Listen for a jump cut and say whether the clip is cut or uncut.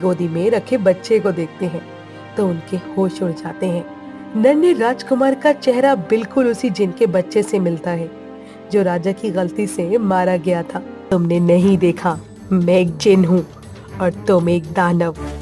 cut